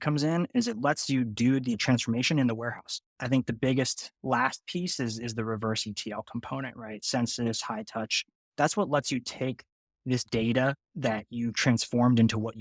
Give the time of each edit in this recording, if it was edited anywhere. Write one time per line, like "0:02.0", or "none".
0:01.8
0:03.2